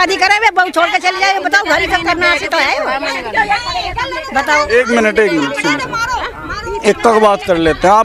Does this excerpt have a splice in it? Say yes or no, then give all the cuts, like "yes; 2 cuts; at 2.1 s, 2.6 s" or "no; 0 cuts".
no; 0 cuts